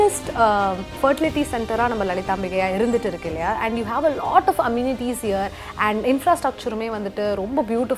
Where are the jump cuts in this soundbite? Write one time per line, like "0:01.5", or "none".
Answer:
none